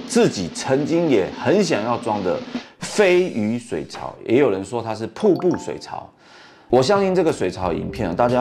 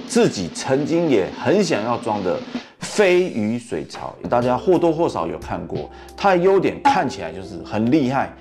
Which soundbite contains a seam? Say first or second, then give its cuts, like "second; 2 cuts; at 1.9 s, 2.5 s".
second; 1 cut; at 4.1 s